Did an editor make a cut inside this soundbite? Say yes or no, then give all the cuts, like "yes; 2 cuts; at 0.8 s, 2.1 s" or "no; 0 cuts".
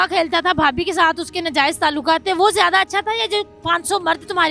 no; 0 cuts